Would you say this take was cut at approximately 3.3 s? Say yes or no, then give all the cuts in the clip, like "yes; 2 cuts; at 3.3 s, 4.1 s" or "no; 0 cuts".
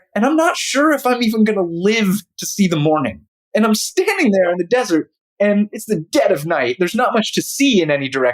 yes; 1 cut; at 3.3 s